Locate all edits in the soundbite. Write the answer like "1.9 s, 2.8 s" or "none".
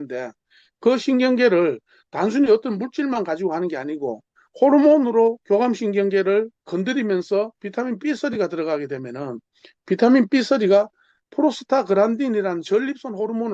none

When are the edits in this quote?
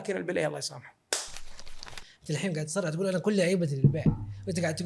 1.8 s

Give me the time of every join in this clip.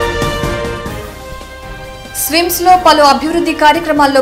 0.9 s

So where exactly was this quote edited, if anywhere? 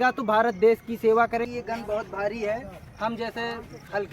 1.5 s

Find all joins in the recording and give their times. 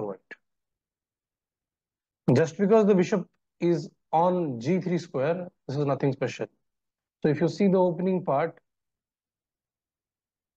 none

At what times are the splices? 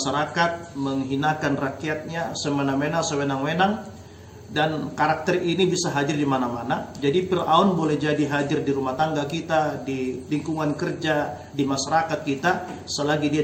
none

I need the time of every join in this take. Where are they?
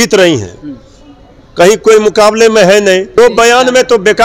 3.2 s

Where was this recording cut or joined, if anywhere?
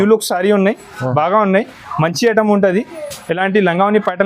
none

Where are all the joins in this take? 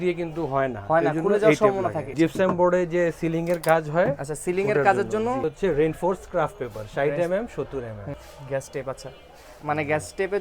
2.1 s, 5.4 s, 8.2 s

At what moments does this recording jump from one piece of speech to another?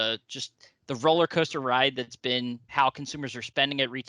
2.7 s

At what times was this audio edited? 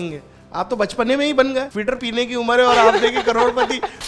2.0 s

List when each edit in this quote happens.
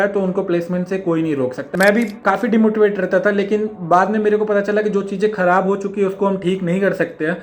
1.6 s

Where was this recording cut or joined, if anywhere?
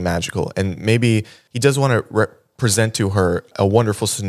1.4 s, 3.5 s

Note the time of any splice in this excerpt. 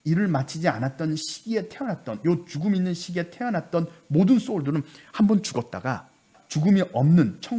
6.4 s

